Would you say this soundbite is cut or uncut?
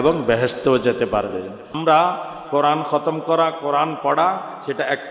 cut